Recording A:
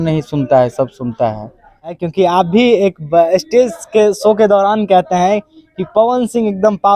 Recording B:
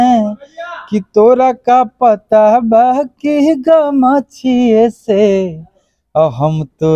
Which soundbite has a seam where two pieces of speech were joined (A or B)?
A